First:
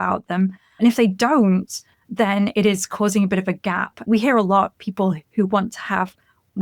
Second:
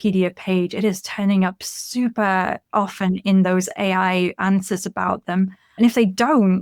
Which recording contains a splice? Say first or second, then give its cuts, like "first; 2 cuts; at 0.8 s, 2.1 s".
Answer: first; 1 cut; at 4.0 s